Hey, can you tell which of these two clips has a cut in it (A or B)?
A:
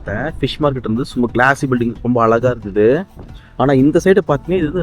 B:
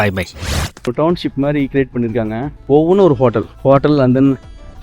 B